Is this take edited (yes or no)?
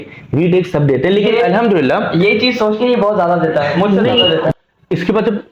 yes